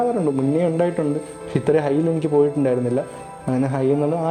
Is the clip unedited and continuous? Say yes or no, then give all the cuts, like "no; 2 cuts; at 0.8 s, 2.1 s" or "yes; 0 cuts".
yes; 0 cuts